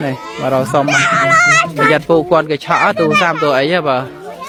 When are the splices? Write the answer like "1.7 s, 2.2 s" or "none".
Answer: none